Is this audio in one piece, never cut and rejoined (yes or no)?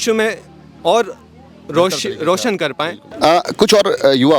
yes